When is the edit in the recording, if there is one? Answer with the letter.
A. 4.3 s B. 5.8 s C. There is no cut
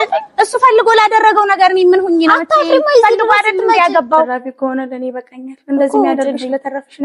A